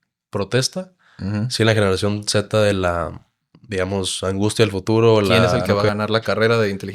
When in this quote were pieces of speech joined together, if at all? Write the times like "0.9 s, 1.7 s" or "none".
5.6 s